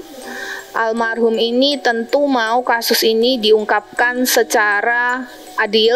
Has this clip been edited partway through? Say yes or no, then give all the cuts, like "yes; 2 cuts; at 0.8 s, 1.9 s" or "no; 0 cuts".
no; 0 cuts